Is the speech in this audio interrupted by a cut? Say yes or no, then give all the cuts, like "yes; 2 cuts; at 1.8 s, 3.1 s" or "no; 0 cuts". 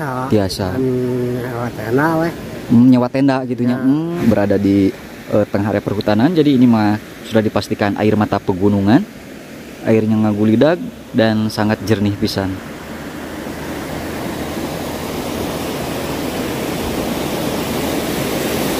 yes; 1 cut; at 4.2 s